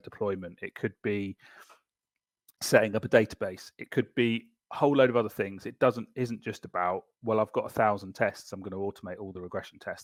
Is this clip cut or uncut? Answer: uncut